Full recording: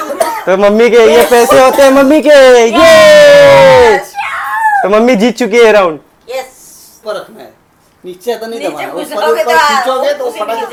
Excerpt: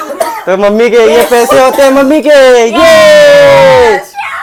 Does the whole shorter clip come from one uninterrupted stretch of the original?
yes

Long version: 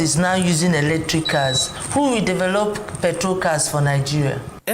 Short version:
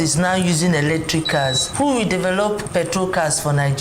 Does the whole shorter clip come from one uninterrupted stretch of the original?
no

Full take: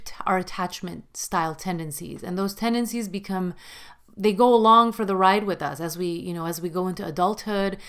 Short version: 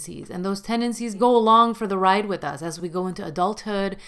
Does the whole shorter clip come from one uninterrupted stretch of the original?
no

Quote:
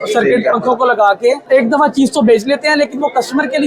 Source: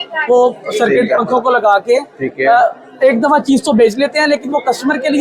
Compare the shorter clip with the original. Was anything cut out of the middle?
yes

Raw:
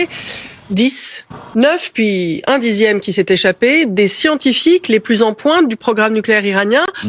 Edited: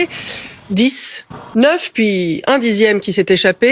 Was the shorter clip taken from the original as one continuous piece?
yes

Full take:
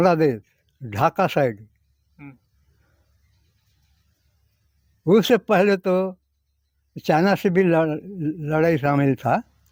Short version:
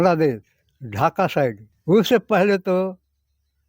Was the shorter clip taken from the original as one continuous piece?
no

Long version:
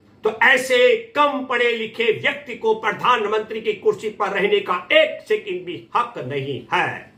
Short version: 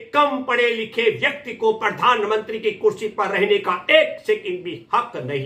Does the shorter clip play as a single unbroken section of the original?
yes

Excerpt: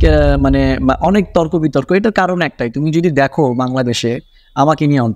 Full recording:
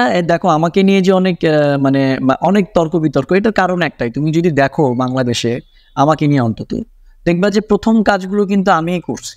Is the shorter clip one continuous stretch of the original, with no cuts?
yes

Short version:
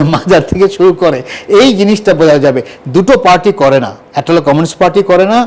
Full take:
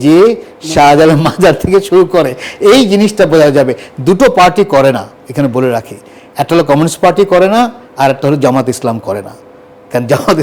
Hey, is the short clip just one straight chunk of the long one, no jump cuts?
no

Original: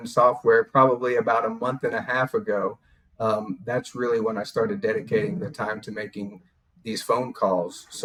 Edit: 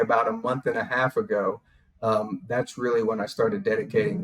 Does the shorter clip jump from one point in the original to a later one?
no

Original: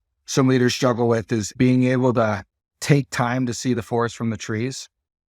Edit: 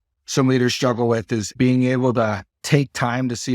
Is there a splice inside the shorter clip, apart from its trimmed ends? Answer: yes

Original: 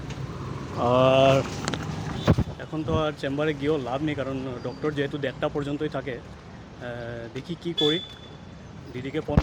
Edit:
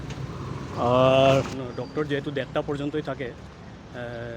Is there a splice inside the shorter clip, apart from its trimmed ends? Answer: yes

